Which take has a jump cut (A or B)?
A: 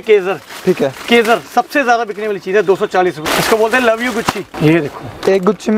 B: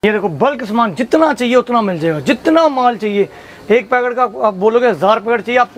A